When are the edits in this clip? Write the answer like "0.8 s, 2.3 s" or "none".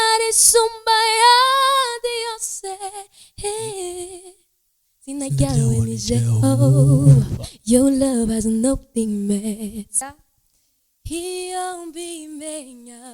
10.0 s